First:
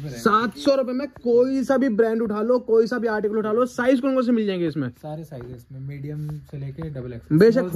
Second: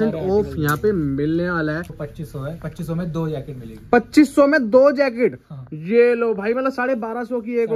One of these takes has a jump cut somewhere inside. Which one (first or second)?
second